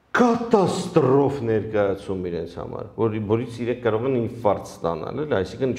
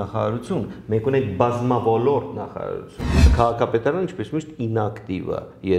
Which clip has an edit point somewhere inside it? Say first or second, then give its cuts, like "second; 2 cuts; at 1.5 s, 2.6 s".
second; 1 cut; at 3.2 s